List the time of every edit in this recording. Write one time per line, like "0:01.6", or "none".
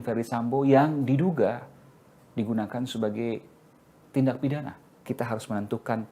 0:05.0